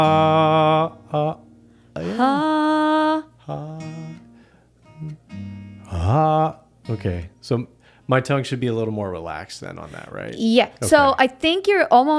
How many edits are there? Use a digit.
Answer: 0